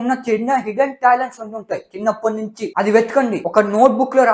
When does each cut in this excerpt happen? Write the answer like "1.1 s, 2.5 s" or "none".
none